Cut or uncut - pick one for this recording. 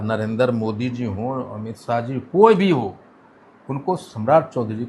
uncut